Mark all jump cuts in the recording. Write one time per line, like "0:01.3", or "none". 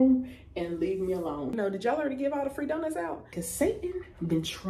0:01.5
0:03.4

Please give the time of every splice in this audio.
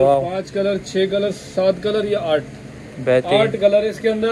none

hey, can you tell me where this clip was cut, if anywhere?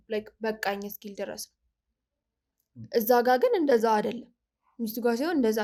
none

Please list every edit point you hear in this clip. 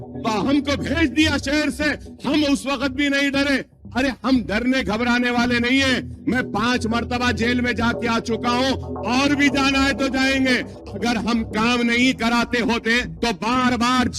0:10.8
0:13.1

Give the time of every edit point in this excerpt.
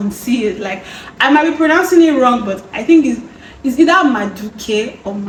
none

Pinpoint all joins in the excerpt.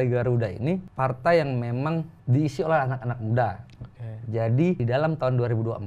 0:00.9
0:02.2
0:04.8

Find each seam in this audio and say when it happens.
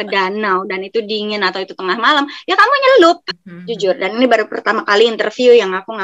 0:03.2

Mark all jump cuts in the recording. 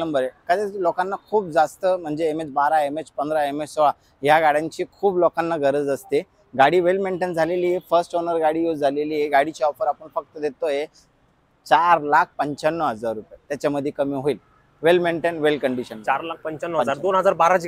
none

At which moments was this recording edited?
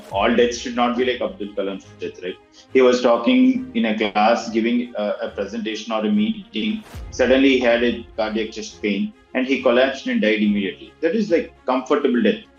none

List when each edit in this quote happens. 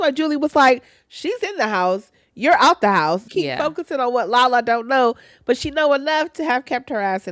0:03.2

